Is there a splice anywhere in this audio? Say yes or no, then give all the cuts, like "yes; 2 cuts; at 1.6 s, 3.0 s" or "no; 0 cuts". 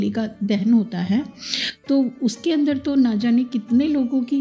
no; 0 cuts